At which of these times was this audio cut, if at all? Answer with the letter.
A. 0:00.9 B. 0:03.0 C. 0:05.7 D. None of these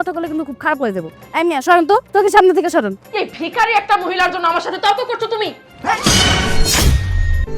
B